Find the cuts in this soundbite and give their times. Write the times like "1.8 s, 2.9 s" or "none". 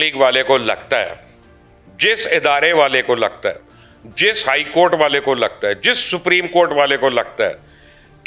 none